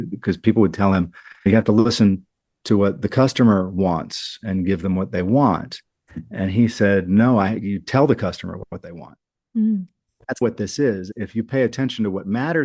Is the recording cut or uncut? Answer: cut